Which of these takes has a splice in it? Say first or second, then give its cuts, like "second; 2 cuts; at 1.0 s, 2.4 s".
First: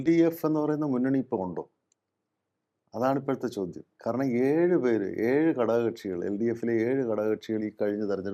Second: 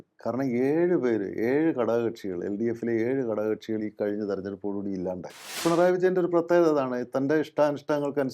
second; 1 cut; at 5.6 s